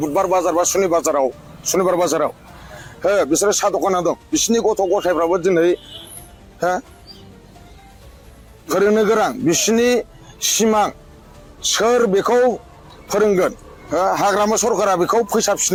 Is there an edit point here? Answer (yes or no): no